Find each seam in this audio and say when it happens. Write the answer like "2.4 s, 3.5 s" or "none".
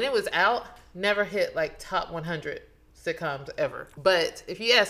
3.8 s